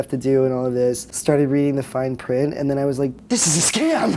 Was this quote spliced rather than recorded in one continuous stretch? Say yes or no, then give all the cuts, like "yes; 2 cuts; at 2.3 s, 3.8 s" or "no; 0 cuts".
yes; 2 cuts; at 1.1 s, 3.2 s